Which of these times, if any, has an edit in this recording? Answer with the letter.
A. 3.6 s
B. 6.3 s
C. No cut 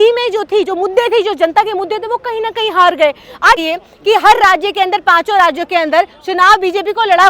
A